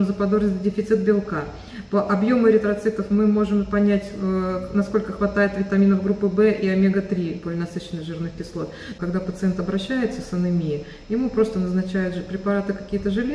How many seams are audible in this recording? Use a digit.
1